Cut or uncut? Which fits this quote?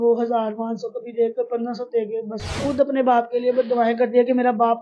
cut